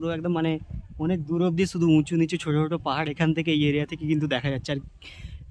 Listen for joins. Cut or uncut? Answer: uncut